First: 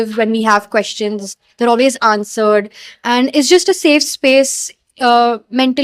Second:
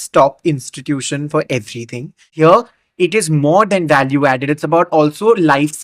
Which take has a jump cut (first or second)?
second